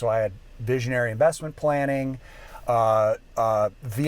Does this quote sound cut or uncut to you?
uncut